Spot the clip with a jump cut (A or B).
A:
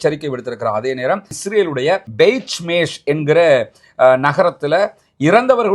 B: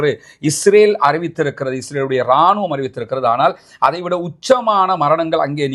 A